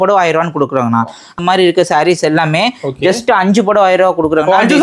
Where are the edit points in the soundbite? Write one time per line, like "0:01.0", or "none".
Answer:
0:01.3